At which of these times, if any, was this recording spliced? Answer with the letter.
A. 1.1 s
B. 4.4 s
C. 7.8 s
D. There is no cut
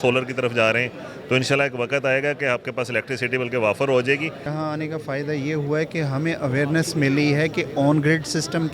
B